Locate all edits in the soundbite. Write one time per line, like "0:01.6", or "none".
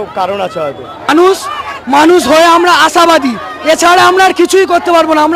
0:01.1